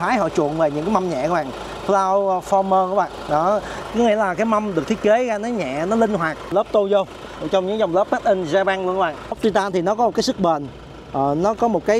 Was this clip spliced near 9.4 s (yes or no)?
yes